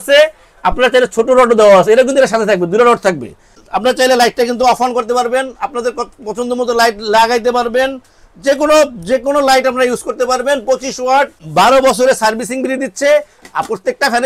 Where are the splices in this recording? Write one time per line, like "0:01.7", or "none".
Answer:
0:03.7
0:11.4